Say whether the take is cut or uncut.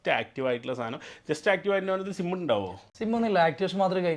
uncut